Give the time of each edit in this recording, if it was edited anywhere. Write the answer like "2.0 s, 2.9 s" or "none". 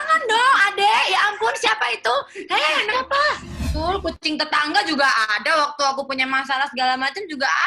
3.6 s